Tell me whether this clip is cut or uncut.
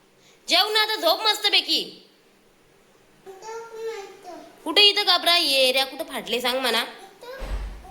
cut